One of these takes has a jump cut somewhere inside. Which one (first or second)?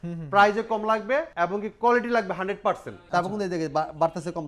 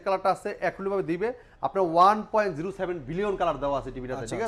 first